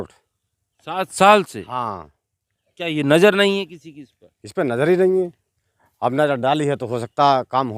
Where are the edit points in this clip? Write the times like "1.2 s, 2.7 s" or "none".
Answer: none